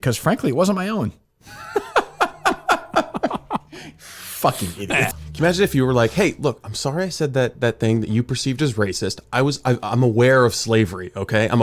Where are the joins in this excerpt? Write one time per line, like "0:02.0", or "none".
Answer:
0:05.2